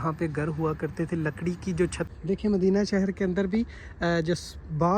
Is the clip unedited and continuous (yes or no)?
no